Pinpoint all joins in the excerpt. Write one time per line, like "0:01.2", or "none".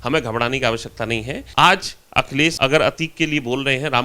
0:01.4
0:02.6

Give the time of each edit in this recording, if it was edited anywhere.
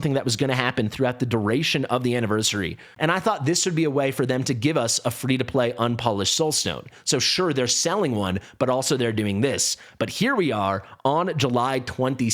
0:02.9

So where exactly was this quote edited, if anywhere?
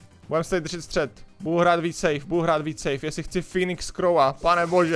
none

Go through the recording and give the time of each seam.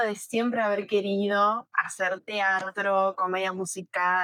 none

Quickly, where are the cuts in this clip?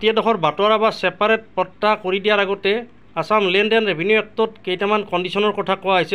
none

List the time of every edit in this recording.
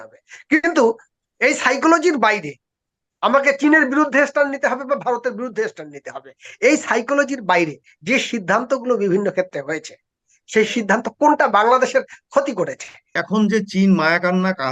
0:13.1

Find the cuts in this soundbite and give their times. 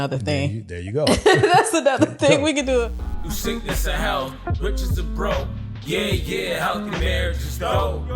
0:03.1

